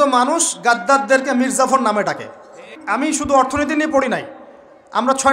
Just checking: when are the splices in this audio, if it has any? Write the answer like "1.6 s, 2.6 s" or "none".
2.8 s